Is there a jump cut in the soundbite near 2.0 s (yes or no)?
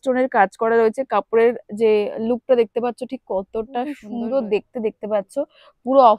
no